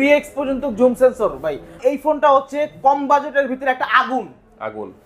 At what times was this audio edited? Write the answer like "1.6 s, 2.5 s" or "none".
1.8 s

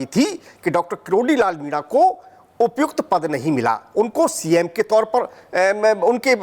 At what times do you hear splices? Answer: none

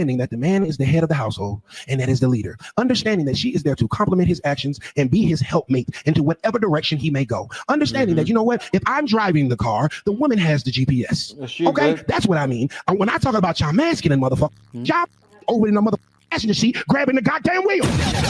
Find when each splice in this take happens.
none

